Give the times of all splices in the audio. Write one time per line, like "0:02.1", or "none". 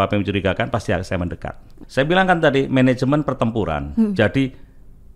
0:01.8